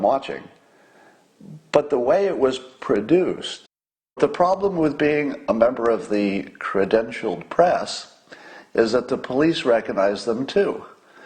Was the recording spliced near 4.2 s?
yes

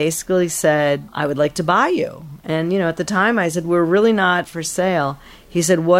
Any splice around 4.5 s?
yes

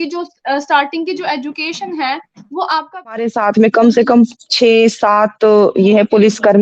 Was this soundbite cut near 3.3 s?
yes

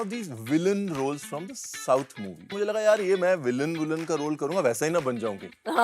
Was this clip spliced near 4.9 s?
no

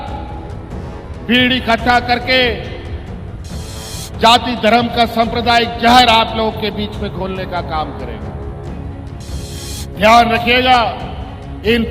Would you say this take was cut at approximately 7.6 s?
no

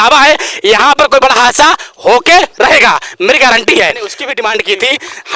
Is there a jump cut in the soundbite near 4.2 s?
yes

